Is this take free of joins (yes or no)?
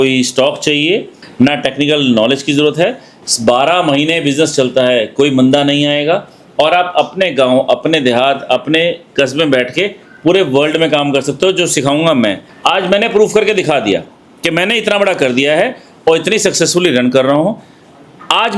no